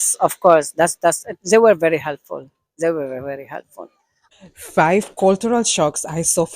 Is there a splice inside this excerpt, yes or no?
yes